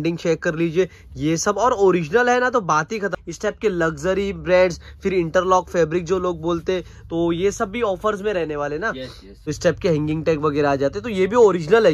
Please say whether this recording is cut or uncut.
cut